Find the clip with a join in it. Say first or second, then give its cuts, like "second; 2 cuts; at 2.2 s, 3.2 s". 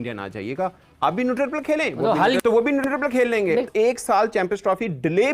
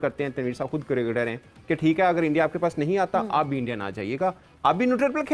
first; 1 cut; at 3.7 s